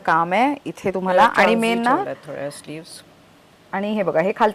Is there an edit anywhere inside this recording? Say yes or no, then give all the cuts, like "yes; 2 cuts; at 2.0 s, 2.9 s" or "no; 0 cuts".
no; 0 cuts